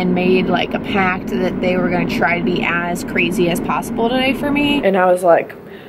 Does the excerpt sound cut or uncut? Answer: cut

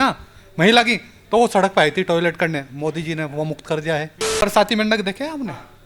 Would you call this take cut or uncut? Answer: cut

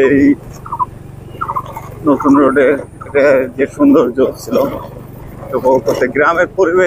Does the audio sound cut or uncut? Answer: uncut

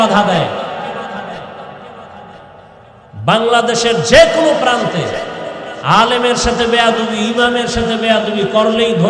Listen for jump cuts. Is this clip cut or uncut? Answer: cut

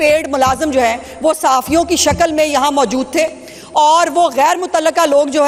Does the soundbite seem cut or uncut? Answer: uncut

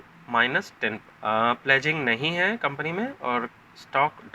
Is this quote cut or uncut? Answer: uncut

